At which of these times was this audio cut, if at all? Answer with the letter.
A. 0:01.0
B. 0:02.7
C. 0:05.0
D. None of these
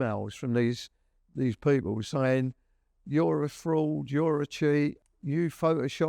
C